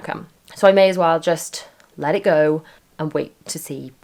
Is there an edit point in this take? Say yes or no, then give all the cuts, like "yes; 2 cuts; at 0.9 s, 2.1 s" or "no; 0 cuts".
no; 0 cuts